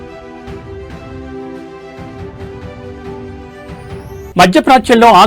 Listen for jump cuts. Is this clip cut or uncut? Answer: cut